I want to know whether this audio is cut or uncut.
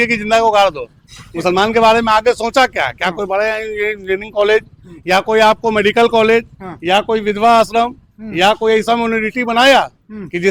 uncut